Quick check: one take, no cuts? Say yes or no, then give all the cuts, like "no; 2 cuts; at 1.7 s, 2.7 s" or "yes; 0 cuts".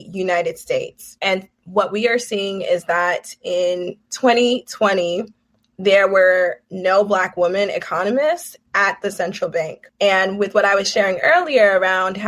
no; 2 cuts; at 1.0 s, 9.8 s